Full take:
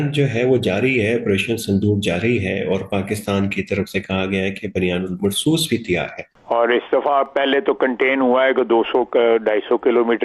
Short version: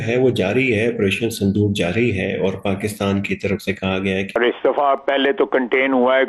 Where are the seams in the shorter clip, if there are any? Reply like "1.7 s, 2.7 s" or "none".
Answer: 4.4 s